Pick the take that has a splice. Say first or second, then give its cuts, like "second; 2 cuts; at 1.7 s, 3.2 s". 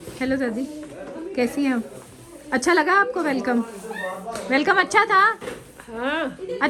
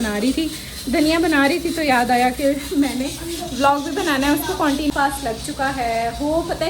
second; 1 cut; at 4.9 s